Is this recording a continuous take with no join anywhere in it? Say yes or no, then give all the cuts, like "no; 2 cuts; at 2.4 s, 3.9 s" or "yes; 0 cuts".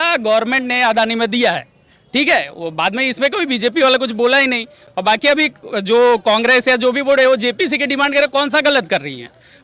yes; 0 cuts